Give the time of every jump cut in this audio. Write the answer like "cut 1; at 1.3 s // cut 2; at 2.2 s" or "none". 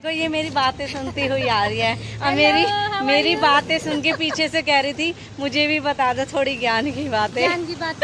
none